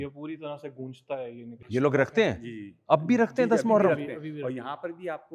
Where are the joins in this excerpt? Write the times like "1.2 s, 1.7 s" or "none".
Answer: 1.5 s